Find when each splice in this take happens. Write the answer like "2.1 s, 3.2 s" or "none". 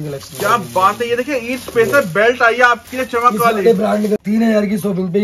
4.2 s